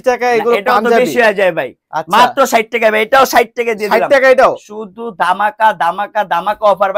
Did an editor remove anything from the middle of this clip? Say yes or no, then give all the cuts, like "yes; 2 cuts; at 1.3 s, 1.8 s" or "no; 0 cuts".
no; 0 cuts